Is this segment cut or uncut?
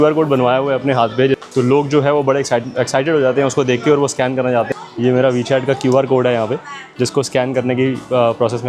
cut